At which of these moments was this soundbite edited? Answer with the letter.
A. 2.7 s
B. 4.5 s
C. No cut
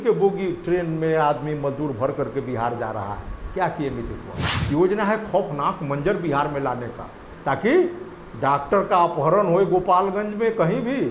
B